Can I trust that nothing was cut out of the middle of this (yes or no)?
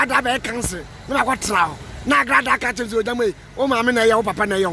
yes